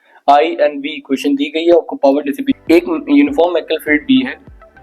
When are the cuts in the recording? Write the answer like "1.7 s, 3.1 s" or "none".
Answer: 2.6 s